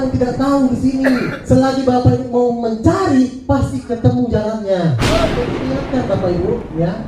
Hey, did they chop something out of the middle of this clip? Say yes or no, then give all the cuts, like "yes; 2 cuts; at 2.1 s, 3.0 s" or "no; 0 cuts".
yes; 1 cut; at 5.6 s